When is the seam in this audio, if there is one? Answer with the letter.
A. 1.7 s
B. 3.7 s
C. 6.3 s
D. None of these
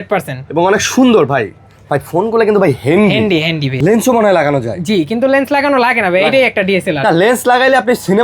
B